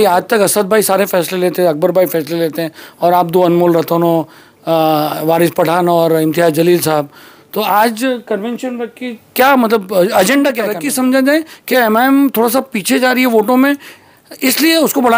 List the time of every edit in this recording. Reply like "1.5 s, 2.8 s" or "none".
10.8 s

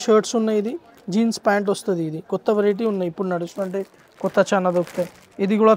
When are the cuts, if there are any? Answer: none

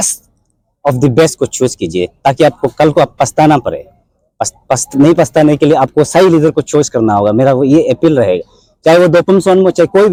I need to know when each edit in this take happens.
none

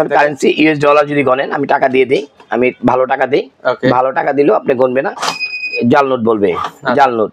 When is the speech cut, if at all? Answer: none

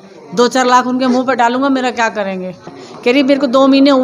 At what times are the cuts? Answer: 2.7 s

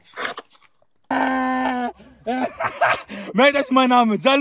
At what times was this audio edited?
1.1 s

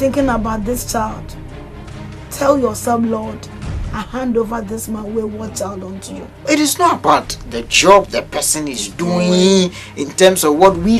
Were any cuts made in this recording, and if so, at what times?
6.3 s

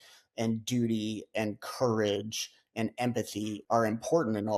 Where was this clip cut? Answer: 3.6 s

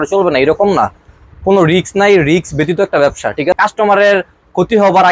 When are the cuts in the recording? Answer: 3.6 s

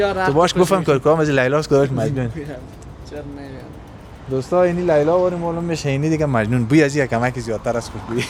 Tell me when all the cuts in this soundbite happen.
none

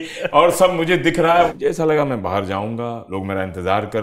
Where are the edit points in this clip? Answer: 1.5 s, 3.0 s

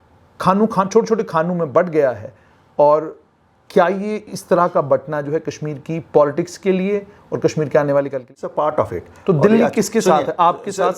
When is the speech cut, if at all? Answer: 8.5 s

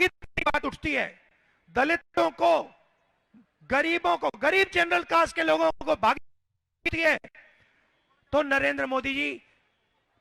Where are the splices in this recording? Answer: none

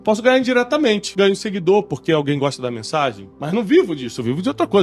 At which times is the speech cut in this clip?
1.1 s, 3.3 s

